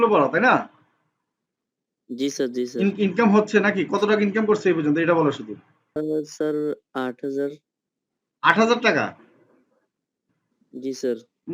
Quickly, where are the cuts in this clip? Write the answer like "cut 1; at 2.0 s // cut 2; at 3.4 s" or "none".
cut 1; at 6.0 s